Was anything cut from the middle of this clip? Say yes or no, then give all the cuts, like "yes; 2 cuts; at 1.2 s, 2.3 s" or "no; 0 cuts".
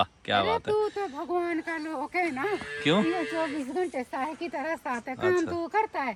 no; 0 cuts